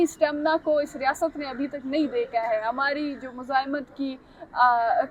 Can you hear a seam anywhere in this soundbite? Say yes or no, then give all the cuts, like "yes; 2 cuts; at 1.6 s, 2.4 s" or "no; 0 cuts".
no; 0 cuts